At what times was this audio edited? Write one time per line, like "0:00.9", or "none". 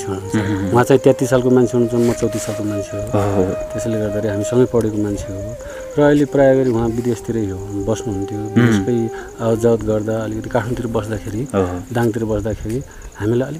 none